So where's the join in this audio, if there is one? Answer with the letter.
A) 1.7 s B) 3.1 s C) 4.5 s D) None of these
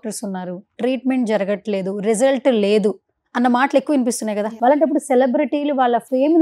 C